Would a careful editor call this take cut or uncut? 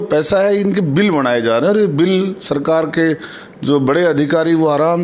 uncut